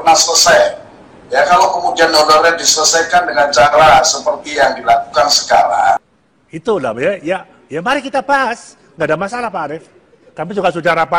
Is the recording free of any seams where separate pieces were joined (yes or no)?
no